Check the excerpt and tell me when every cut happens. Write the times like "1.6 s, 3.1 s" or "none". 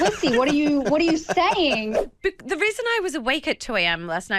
2.0 s